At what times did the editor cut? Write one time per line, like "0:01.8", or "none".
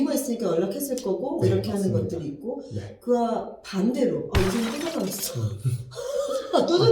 none